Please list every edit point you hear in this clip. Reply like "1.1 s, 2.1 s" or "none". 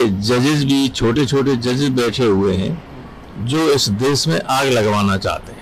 none